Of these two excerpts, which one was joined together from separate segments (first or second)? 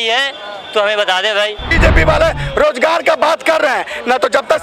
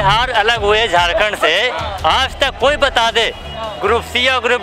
first